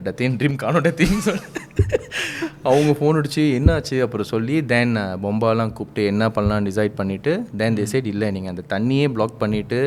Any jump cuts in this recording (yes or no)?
no